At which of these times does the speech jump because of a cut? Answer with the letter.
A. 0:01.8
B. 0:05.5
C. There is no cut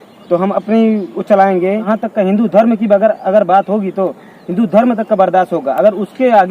A